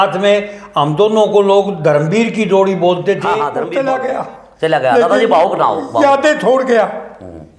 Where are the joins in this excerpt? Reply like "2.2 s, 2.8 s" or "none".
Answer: 3.6 s